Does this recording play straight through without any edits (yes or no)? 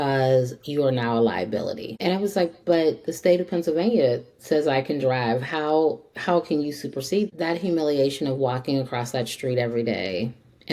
no